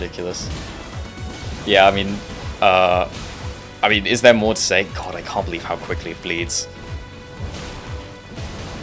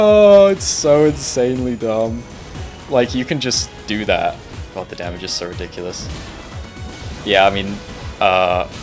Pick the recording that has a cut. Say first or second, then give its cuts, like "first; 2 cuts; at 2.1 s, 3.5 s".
second; 1 cut; at 4.5 s